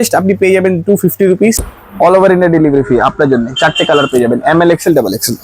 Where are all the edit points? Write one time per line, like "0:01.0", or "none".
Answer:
0:01.6